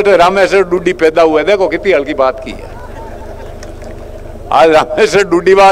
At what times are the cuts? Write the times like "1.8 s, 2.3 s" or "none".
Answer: none